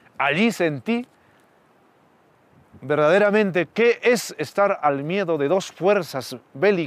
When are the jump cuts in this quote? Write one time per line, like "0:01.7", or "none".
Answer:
0:03.7